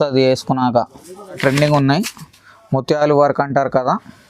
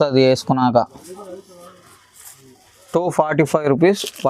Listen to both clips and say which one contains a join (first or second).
first